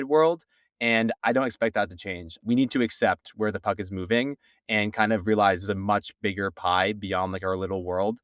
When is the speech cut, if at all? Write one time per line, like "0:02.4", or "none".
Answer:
0:02.4